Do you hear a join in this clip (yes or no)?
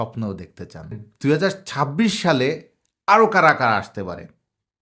yes